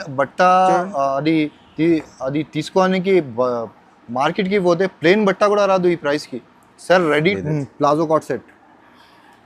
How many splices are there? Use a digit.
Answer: 1